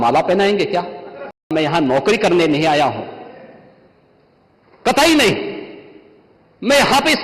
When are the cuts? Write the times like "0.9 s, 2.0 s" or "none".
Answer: 1.5 s

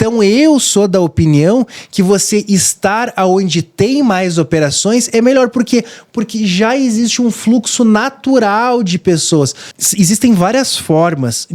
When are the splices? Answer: 9.6 s

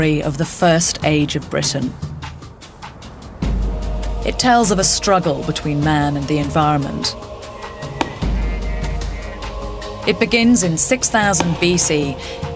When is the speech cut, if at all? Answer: 5.3 s

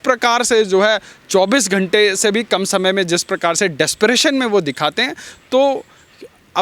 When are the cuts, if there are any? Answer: none

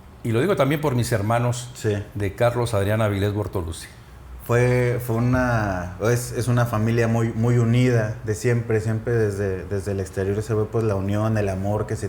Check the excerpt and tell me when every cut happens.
none

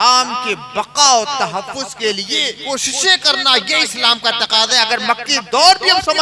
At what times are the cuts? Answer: 2.6 s

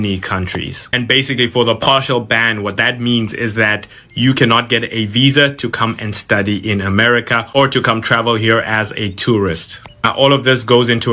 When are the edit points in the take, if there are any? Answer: none

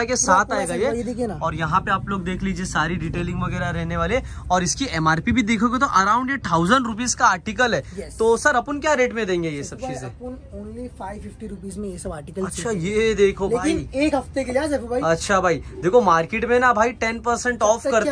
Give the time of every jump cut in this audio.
none

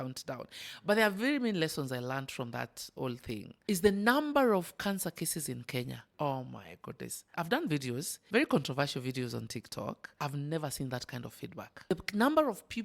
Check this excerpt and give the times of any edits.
3.5 s, 6.0 s, 7.3 s, 8.1 s, 10.1 s, 11.9 s

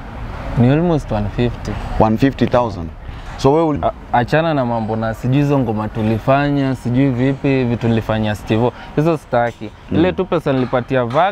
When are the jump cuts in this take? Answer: 3.8 s

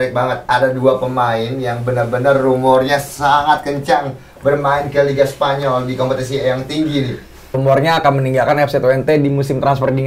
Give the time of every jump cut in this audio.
7.6 s

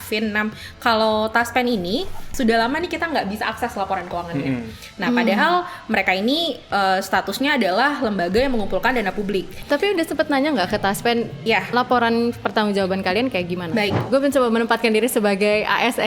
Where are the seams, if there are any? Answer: 2.2 s, 9.6 s, 14.0 s

